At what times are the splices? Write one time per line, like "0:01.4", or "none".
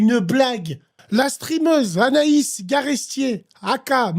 0:00.9